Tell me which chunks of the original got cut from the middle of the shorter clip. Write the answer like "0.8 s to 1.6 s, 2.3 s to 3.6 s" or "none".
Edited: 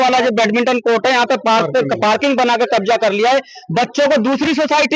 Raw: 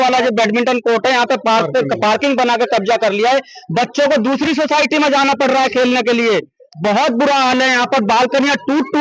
none